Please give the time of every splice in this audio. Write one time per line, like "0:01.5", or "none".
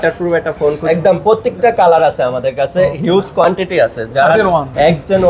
0:00.8
0:04.4